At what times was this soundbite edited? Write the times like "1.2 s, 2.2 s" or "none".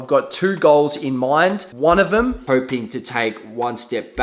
1.7 s, 2.4 s